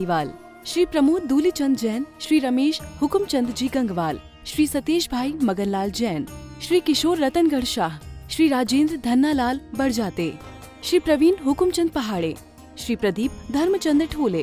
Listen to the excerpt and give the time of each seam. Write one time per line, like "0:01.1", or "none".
none